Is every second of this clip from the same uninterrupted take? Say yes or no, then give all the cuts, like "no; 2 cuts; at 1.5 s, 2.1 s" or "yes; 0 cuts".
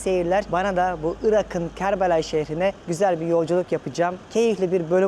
yes; 0 cuts